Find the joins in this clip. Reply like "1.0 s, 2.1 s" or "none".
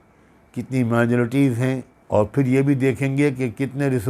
1.9 s